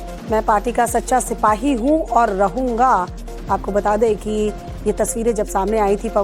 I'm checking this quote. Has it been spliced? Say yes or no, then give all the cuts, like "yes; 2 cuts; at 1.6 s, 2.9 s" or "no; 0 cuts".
yes; 1 cut; at 2.2 s